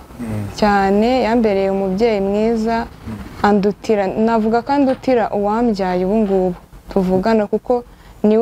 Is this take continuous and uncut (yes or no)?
yes